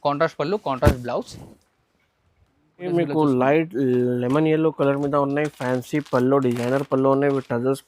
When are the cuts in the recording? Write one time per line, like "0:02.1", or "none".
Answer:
0:02.9